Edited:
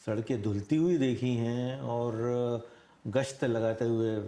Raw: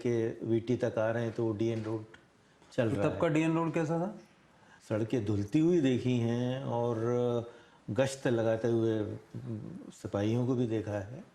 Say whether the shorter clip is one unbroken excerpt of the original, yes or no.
yes